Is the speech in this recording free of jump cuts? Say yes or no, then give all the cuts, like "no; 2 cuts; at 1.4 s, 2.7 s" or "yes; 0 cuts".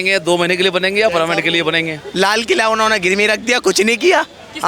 no; 1 cut; at 2.0 s